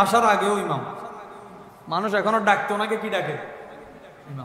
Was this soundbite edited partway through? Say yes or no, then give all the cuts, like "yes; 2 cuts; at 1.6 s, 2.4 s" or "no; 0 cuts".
no; 0 cuts